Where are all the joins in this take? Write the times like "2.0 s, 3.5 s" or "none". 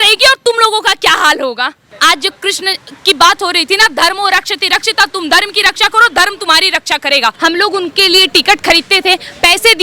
1.9 s, 7.4 s